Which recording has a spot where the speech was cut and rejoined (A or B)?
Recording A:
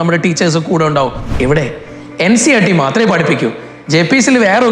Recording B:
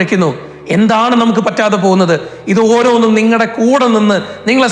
A